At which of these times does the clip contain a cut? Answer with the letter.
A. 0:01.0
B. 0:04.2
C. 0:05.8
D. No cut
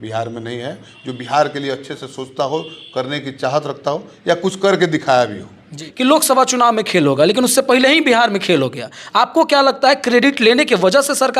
C